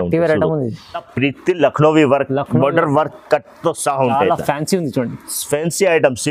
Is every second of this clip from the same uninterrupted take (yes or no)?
no